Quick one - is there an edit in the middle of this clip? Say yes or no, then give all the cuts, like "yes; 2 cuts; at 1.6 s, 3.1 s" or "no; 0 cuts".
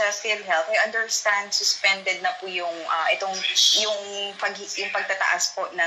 no; 0 cuts